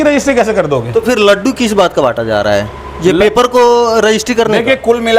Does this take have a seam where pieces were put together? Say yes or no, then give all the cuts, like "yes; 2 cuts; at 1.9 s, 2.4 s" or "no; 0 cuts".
no; 0 cuts